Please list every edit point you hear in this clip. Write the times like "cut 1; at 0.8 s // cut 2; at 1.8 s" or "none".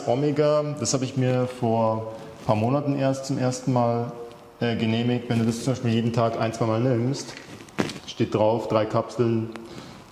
none